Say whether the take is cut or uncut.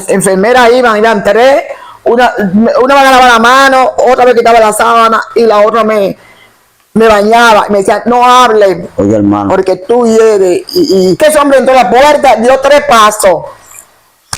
cut